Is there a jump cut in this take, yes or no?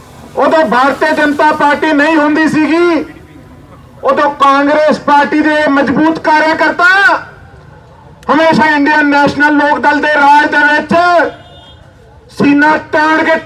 no